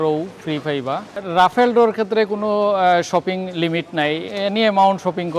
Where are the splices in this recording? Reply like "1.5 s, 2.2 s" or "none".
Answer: 1.1 s, 4.3 s